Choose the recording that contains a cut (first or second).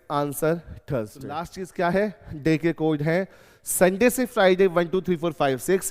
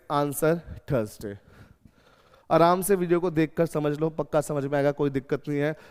first